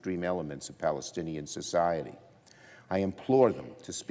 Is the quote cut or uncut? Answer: cut